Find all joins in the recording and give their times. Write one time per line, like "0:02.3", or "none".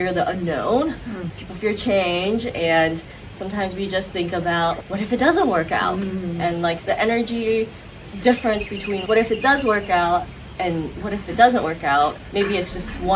none

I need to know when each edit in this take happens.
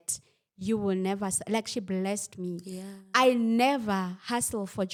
none

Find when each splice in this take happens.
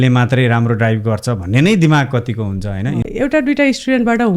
0:03.1

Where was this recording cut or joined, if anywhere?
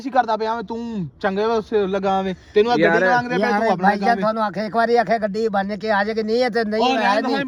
none

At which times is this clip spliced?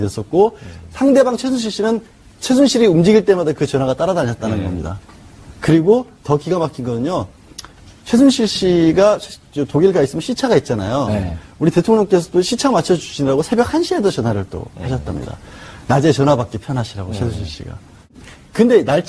0:17.0

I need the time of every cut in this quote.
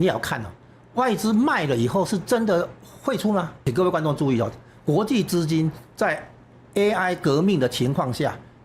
0:03.6

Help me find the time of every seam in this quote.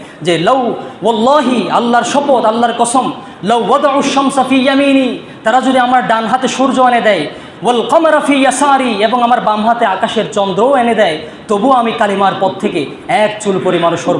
none

